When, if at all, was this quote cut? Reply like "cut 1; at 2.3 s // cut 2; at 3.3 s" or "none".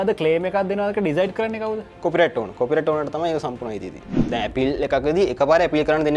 cut 1; at 4.2 s

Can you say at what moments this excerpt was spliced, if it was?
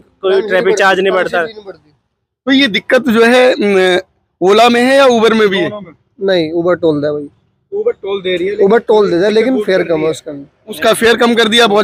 none

